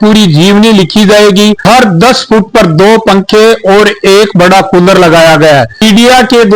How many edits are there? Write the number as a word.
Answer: two